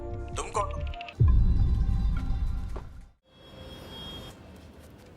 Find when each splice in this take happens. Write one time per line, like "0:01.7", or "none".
0:01.0
0:03.3